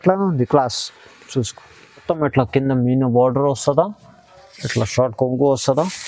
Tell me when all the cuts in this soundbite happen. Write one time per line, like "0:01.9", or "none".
0:02.0